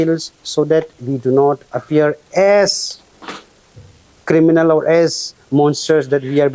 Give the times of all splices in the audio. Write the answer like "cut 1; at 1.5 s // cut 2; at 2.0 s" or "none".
none